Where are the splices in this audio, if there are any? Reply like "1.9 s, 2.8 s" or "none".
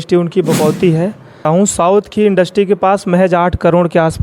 1.4 s